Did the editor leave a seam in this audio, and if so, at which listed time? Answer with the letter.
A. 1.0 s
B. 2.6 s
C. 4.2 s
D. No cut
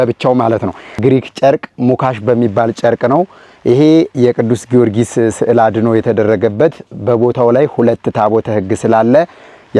A